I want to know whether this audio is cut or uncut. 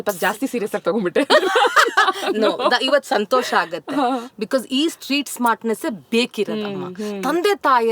uncut